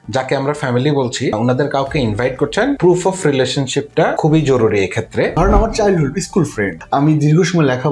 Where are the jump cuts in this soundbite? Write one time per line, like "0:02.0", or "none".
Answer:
0:01.4
0:02.8
0:04.2
0:05.3
0:06.8